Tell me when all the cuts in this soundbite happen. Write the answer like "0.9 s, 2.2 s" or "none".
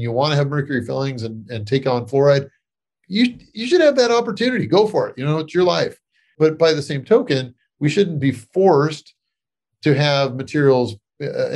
none